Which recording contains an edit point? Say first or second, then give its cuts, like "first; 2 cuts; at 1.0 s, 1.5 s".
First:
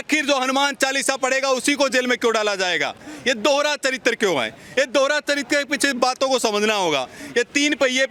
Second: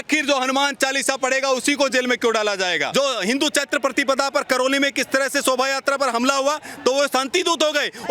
second; 1 cut; at 2.8 s